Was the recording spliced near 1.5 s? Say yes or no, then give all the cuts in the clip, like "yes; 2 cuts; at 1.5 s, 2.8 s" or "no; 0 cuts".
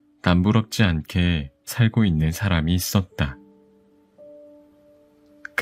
no; 2 cuts; at 3.3 s, 4.9 s